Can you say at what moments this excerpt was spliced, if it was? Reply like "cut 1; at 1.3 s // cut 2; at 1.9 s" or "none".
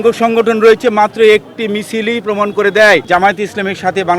cut 1; at 3.0 s